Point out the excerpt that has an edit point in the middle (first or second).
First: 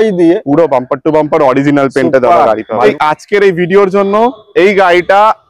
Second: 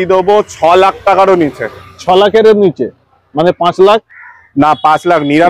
first